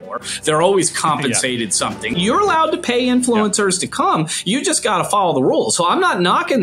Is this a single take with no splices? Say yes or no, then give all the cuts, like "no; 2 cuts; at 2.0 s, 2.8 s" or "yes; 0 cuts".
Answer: no; 1 cut; at 2.2 s